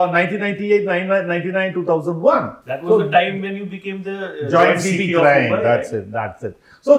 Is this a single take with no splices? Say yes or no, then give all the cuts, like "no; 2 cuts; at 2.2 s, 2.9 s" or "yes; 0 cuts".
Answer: yes; 0 cuts